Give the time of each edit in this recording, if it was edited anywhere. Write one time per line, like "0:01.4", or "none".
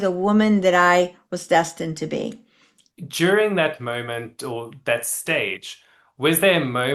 0:02.8

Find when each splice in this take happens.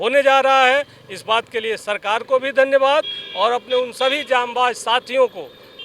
none

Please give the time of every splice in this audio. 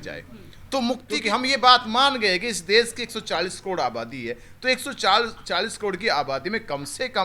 0:01.0

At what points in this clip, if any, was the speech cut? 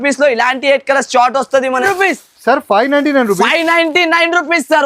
0:01.8

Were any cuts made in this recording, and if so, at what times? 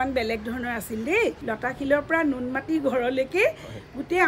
0:01.5

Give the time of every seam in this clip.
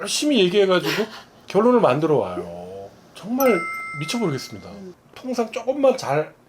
0:04.8

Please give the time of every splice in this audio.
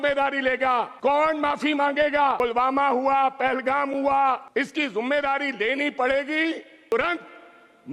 0:00.9
0:02.4
0:04.4
0:06.9

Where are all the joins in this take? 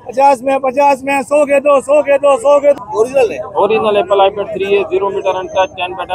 0:02.8

